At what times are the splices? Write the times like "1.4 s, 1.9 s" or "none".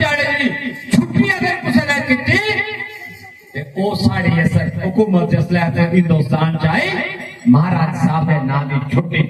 none